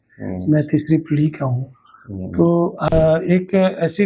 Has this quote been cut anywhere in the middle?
yes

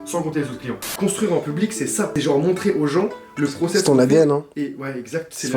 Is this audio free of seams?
no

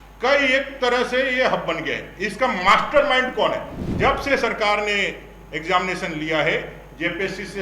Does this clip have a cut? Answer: yes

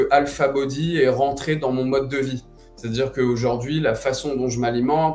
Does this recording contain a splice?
no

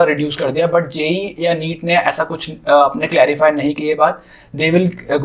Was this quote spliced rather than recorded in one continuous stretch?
no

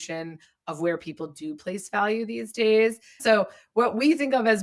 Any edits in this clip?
yes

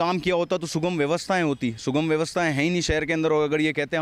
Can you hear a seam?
no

